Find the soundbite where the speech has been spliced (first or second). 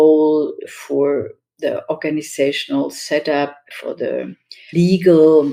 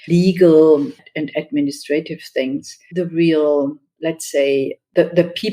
second